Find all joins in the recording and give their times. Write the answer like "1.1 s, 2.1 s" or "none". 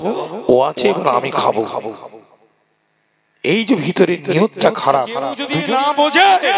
5.4 s